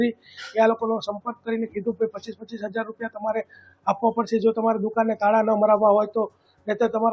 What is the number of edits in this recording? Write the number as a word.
zero